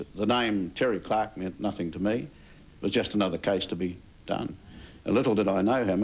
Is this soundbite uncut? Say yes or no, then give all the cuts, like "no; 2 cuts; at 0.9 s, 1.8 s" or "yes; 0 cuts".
yes; 0 cuts